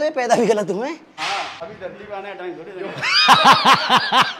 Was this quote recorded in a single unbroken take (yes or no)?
no